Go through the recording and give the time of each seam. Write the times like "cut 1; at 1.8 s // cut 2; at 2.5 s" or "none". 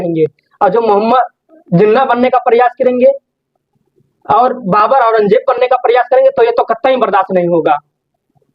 none